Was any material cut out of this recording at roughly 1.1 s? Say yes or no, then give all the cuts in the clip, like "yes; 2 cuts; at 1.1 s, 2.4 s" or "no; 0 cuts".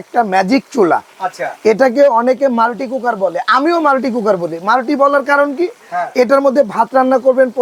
no; 0 cuts